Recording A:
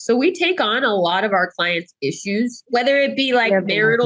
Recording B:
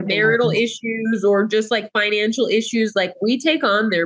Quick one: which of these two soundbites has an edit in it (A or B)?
A